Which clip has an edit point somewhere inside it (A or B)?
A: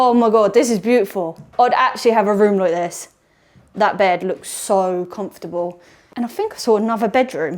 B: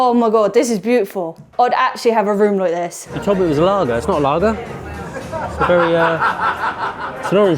B